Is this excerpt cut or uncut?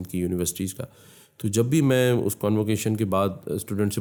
uncut